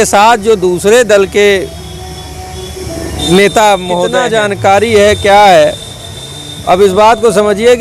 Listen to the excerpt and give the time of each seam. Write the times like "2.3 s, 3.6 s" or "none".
4.2 s